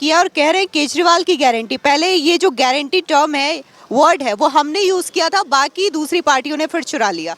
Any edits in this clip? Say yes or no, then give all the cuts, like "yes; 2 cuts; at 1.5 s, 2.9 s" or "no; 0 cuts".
no; 0 cuts